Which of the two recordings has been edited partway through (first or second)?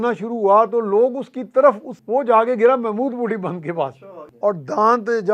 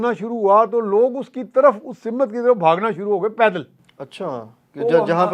first